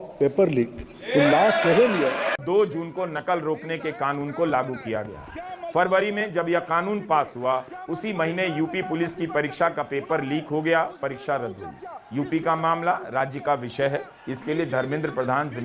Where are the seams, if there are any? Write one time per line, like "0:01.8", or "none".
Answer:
0:02.4